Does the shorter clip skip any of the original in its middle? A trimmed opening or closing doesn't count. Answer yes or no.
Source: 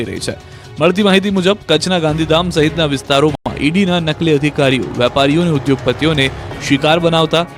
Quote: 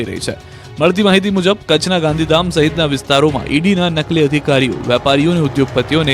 yes